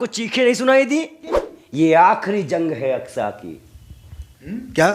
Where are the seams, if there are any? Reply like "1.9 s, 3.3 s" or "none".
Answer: 1.5 s